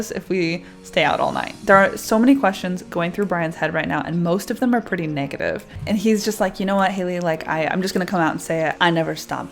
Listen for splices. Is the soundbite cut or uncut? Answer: cut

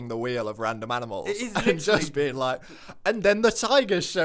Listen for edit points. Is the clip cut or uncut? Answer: uncut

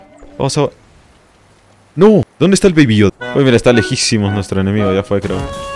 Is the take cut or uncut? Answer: cut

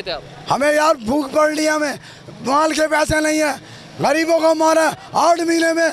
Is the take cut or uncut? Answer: uncut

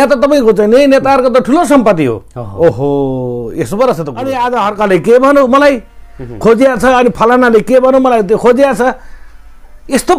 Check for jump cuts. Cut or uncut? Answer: cut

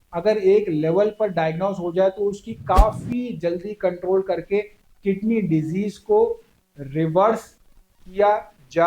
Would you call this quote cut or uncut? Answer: uncut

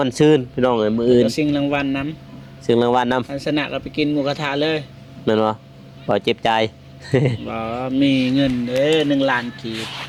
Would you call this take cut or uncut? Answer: uncut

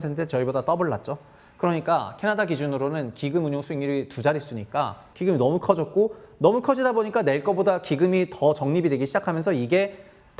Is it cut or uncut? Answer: cut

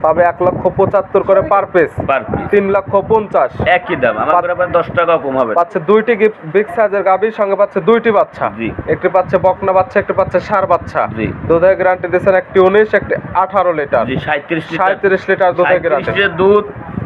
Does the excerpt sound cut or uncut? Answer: uncut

